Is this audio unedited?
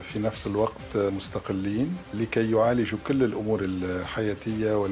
yes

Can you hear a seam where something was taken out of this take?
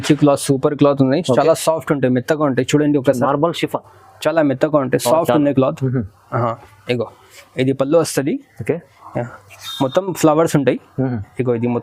no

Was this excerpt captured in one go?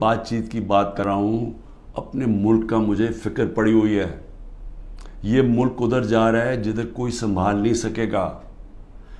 no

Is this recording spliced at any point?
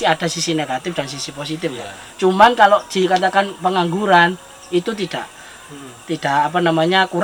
no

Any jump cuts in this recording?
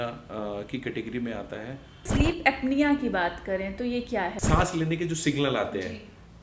yes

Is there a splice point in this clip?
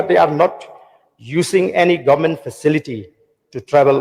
no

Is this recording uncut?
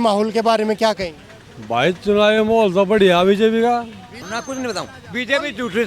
no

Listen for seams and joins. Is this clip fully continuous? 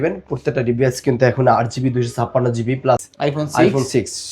no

